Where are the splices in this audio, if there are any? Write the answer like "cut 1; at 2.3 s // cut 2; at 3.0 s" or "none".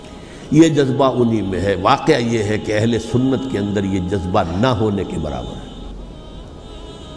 none